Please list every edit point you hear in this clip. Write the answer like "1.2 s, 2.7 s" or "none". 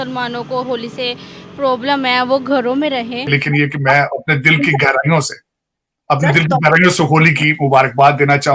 3.3 s